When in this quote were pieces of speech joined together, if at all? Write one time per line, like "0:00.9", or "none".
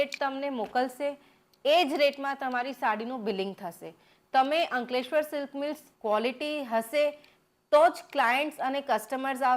0:05.9